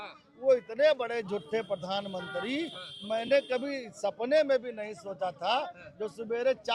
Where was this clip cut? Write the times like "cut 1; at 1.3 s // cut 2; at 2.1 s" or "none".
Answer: none